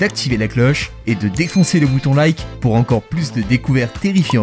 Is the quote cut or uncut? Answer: uncut